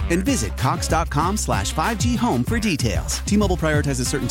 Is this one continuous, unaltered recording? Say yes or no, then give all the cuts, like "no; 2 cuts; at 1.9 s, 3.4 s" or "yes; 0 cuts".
yes; 0 cuts